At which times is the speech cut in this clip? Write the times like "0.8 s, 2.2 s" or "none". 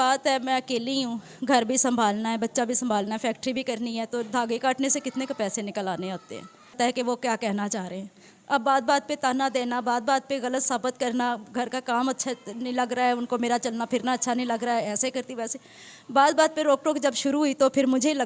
6.8 s